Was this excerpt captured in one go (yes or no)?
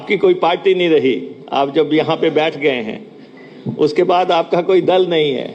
yes